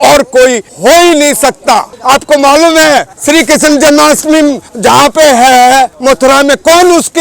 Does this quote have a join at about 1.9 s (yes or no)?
yes